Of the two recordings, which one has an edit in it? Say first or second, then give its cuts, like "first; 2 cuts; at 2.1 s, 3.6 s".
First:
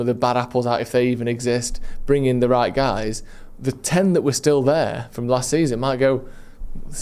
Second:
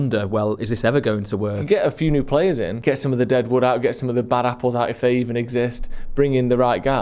second; 2 cuts; at 1.6 s, 2.7 s